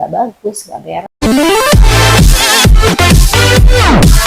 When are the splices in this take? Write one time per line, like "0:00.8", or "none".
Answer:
0:01.2